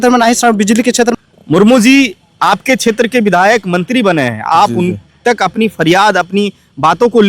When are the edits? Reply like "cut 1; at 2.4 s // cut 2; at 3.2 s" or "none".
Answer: cut 1; at 1.1 s